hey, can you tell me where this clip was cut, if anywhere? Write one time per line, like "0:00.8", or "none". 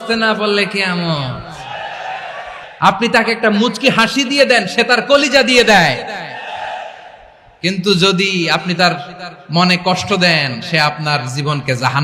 0:02.7